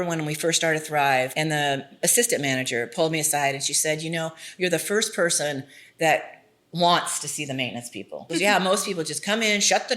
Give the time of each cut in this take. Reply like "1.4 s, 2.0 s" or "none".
1.3 s, 8.2 s